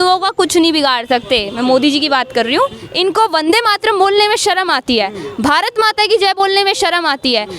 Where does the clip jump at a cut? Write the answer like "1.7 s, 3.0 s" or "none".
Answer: 2.8 s